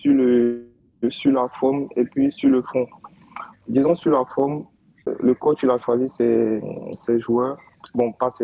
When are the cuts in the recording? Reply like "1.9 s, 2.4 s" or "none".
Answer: 3.6 s, 5.1 s